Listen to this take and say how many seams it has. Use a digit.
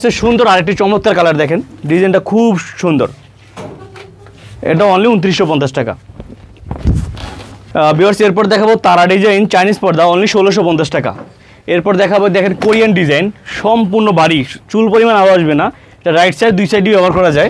0